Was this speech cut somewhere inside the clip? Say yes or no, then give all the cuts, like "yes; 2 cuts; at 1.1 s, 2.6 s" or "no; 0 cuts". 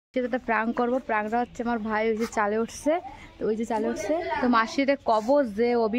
no; 0 cuts